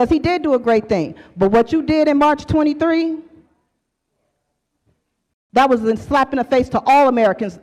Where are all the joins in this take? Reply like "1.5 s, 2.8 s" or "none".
none